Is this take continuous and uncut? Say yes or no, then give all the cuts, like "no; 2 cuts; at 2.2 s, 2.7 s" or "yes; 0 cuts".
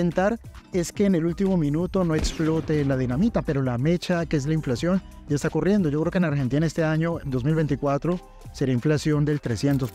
yes; 0 cuts